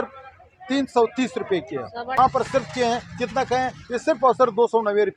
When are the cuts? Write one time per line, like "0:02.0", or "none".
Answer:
0:02.2